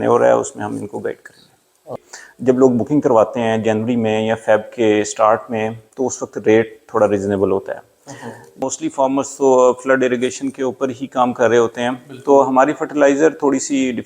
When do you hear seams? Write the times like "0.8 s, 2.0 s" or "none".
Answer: 1.9 s, 8.7 s

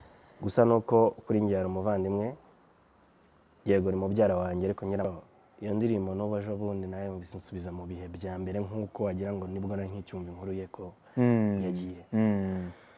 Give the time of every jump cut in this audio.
5.1 s

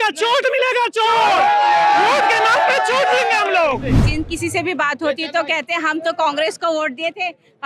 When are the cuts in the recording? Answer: 4.0 s

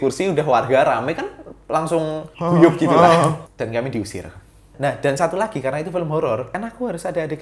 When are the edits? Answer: 2.3 s, 3.5 s, 4.7 s, 6.5 s

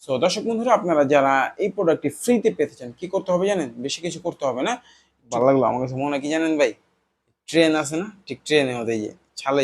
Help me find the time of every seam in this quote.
5.3 s

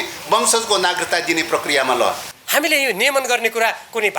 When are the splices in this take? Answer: 2.3 s

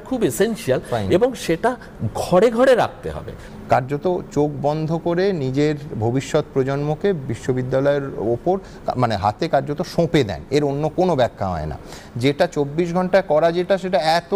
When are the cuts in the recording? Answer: none

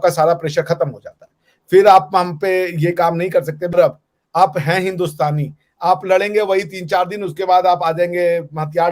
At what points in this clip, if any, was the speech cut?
3.7 s

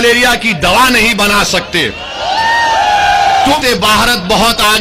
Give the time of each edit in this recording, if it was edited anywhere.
3.6 s

